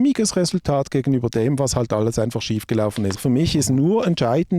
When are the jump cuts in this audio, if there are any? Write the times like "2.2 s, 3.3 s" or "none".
3.2 s